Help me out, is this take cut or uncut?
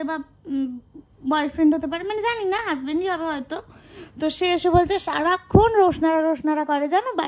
uncut